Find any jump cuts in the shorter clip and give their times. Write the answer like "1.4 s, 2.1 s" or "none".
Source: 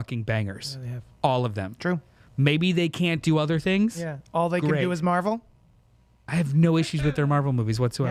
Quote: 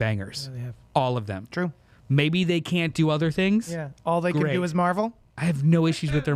5.3 s